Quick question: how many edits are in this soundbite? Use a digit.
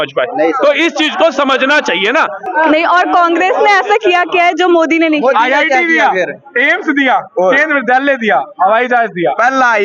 1